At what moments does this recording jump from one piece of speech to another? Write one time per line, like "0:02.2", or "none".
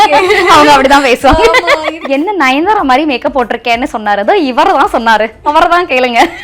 0:01.8